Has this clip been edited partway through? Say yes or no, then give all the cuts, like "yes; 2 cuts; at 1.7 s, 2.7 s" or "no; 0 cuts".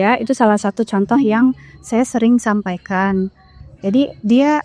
no; 0 cuts